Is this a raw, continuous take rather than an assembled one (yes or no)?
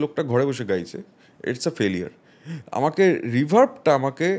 yes